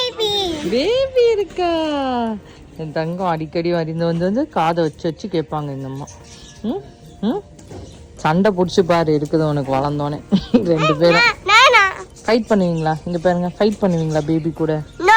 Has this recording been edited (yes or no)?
no